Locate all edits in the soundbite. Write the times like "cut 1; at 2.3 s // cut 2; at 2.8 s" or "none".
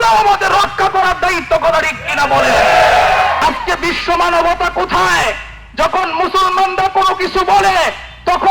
cut 1; at 3.4 s